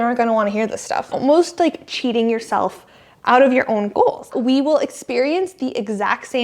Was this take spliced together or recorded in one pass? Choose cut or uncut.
cut